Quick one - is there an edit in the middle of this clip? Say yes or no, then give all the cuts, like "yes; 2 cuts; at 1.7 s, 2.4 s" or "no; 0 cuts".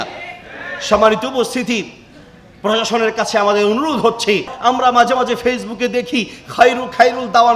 yes; 1 cut; at 4.5 s